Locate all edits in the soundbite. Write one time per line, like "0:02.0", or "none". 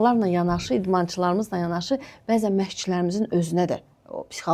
none